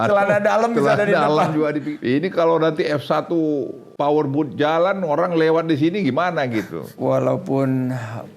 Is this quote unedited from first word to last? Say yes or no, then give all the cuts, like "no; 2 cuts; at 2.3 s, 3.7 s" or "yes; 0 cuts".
no; 3 cuts; at 1.9 s, 3.8 s, 6.9 s